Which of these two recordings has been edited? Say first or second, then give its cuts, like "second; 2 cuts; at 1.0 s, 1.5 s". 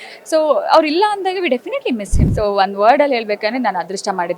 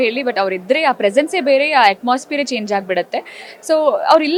first; 1 cut; at 2.2 s